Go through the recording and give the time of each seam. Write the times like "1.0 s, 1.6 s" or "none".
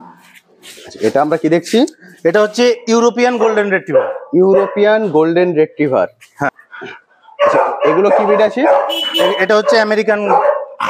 6.5 s